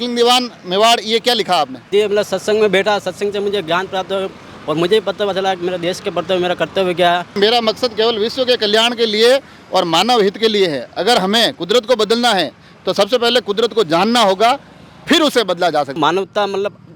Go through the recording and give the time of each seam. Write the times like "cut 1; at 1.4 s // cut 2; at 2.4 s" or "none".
cut 1; at 1.9 s // cut 2; at 7.4 s // cut 3; at 16.0 s